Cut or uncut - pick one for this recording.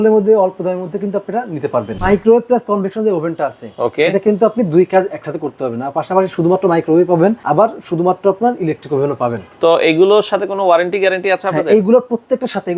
cut